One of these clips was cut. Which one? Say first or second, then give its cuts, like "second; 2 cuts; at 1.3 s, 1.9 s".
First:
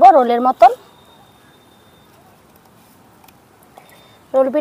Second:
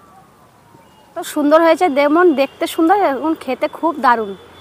second; 1 cut; at 1.3 s